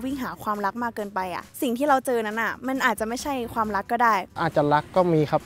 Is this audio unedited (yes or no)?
no